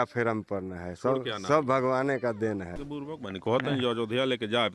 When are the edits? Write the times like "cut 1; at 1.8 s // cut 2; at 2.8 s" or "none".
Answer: cut 1; at 2.8 s